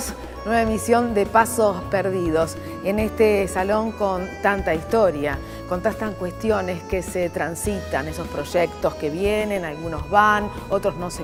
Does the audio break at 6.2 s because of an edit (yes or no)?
no